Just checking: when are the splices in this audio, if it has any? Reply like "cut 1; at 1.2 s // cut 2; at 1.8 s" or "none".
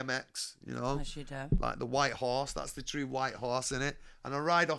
none